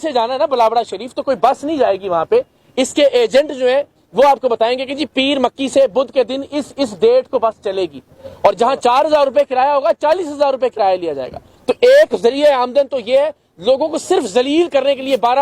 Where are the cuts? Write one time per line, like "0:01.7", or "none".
none